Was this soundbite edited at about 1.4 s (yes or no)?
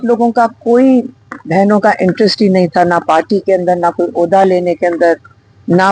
no